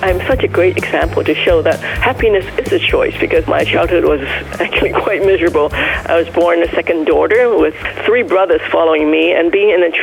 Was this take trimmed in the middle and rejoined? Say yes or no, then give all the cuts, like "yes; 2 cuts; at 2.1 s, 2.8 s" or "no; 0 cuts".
yes; 1 cut; at 3.4 s